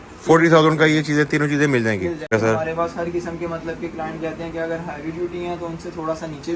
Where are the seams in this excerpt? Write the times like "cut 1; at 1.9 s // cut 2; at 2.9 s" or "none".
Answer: cut 1; at 2.3 s

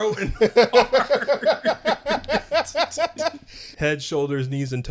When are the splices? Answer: cut 1; at 3.7 s

